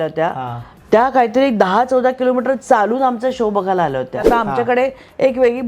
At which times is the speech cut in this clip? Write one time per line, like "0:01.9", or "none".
0:04.3